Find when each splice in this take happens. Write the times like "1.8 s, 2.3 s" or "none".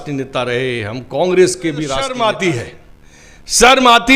2.1 s